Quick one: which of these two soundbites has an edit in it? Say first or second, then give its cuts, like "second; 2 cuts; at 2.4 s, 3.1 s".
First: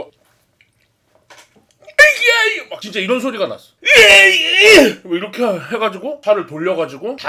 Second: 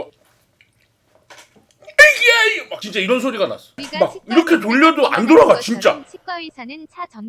second; 1 cut; at 3.8 s